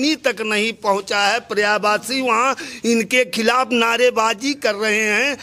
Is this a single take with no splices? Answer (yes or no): yes